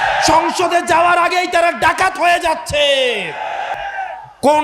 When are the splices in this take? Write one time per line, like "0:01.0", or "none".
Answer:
0:03.7